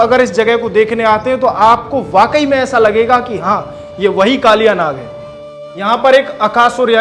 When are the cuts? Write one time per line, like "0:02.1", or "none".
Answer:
0:05.4